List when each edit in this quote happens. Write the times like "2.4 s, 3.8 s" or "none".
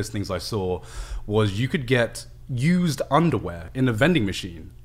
3.6 s